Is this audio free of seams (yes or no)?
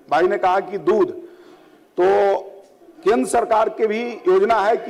yes